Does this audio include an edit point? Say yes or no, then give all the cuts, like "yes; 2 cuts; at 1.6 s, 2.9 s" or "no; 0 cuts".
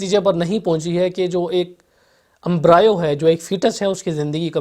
no; 0 cuts